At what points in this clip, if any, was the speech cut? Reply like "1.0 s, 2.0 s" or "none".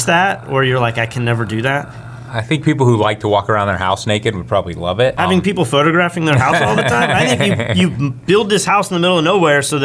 5.2 s